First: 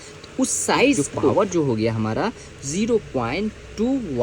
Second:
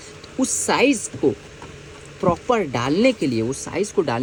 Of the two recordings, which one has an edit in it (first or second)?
first